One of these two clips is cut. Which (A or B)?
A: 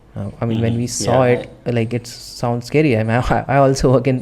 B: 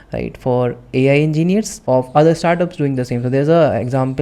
B